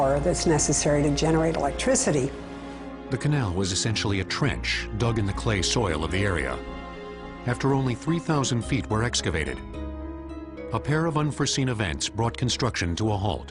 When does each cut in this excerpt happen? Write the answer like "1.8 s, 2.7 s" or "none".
none